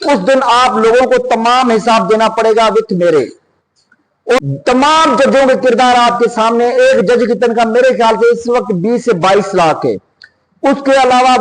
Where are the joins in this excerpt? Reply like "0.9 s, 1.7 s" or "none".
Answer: 4.4 s